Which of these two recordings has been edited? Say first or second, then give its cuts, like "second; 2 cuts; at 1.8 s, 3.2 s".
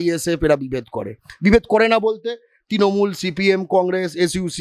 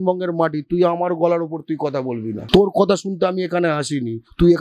second; 1 cut; at 2.4 s